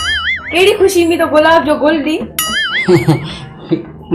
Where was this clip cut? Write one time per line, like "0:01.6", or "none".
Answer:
none